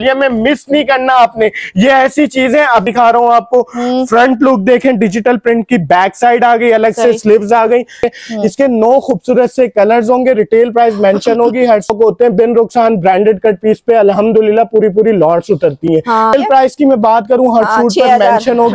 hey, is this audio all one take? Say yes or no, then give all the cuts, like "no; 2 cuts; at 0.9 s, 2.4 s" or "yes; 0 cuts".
no; 4 cuts; at 2.8 s, 8.1 s, 11.9 s, 16.3 s